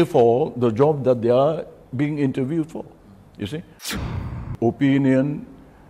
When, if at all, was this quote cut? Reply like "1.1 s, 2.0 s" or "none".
4.1 s